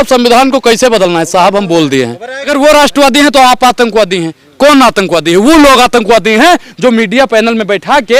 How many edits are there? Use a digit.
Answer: 1